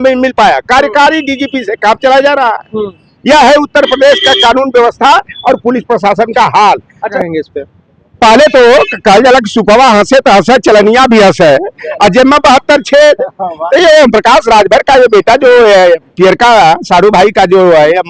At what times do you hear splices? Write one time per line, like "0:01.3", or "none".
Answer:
0:07.1